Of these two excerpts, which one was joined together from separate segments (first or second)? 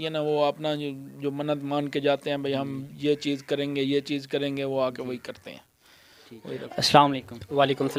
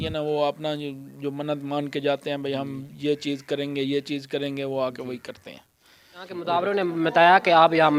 second